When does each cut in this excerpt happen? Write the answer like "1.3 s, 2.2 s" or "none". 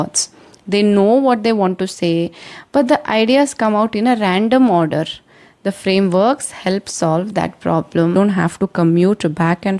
8.2 s

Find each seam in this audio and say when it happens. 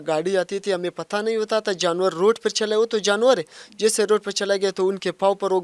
none

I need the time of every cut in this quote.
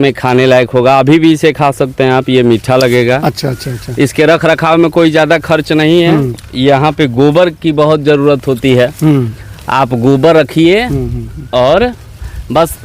none

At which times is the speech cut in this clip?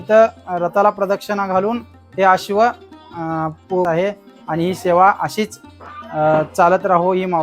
3.9 s

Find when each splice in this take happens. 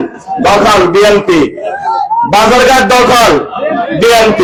none

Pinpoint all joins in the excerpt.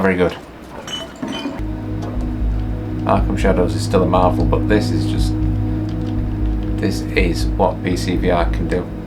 1.6 s

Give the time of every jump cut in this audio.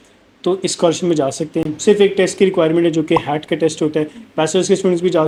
none

